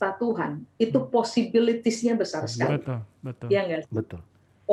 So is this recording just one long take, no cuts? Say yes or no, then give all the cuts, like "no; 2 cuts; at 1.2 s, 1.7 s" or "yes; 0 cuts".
yes; 0 cuts